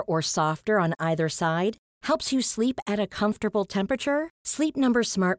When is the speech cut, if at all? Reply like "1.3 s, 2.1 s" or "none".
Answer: none